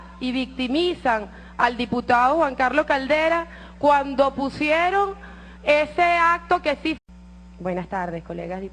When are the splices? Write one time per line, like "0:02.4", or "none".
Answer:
none